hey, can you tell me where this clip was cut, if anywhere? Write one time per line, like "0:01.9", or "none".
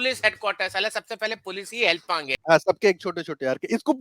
0:02.3